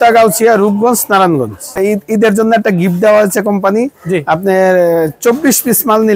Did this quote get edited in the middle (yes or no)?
yes